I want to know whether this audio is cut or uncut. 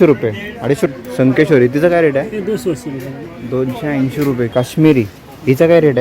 cut